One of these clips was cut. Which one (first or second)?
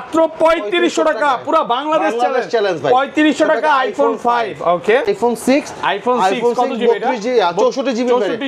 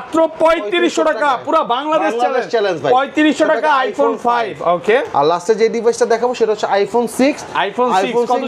first